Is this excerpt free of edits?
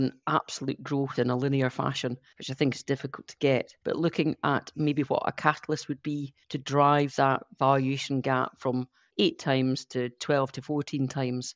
no; 2 cuts; at 3.7 s, 9.0 s

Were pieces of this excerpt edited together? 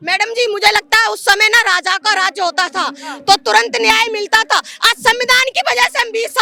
no; 0 cuts

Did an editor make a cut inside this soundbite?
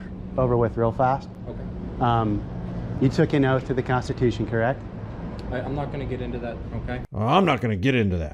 no; 0 cuts

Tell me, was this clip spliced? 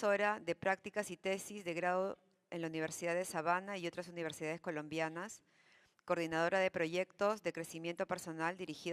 no; 0 cuts

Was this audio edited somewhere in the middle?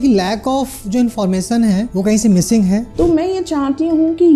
yes; 2 cuts; at 1.9 s, 2.9 s

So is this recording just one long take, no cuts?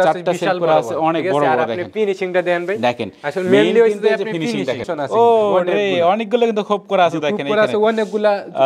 no; 1 cut; at 4.9 s

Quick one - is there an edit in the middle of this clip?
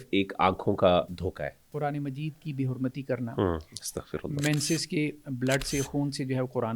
yes; 1 cut; at 1.3 s

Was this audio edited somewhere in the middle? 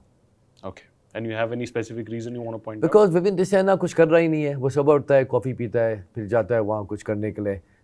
no; 0 cuts

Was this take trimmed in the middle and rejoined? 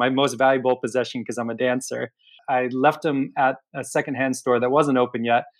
yes; 1 cut; at 2.4 s

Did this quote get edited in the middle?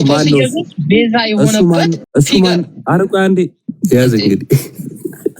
yes; 2 cuts; at 2.0 s, 3.6 s

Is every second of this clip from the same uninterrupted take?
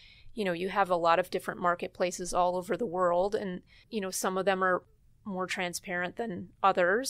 no; 2 cuts; at 3.8 s, 4.9 s

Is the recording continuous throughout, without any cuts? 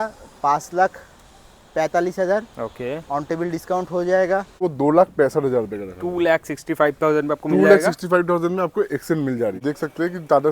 no; 2 cuts; at 4.6 s, 9.6 s

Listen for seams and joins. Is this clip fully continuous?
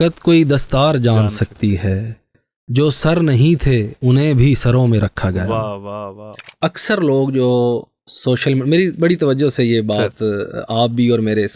no; 1 cut; at 6.5 s

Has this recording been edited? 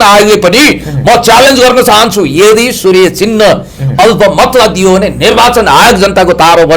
no; 0 cuts

